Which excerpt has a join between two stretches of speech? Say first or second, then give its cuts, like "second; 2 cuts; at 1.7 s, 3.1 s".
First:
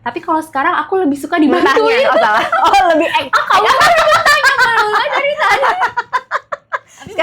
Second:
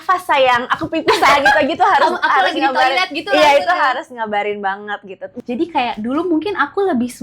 second; 1 cut; at 5.3 s